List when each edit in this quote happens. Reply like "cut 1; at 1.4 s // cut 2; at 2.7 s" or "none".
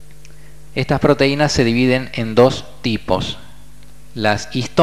cut 1; at 1.7 s